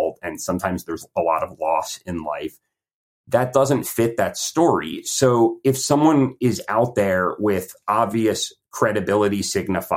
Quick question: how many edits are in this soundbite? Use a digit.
0